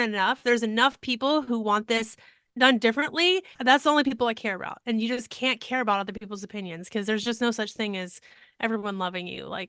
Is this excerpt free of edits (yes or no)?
yes